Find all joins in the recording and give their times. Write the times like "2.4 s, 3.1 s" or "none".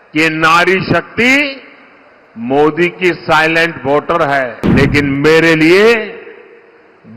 4.6 s